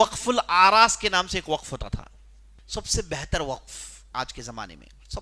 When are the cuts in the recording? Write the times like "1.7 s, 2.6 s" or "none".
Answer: 2.5 s